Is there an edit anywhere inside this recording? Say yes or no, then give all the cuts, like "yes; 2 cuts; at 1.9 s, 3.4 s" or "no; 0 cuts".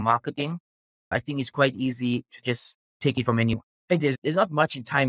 yes; 2 cuts; at 1.1 s, 3.7 s